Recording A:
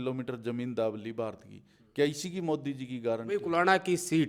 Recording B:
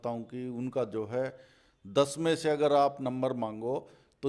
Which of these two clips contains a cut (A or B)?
A